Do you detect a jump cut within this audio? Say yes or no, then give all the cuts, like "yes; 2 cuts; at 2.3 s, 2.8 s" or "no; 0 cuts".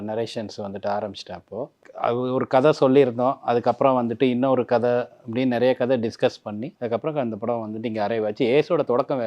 yes; 2 cuts; at 1.8 s, 6.7 s